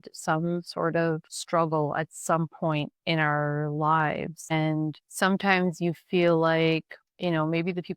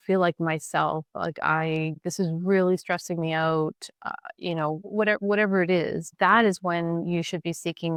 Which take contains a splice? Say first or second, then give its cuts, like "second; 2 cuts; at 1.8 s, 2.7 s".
first; 3 cuts; at 1.3 s, 5.0 s, 7.0 s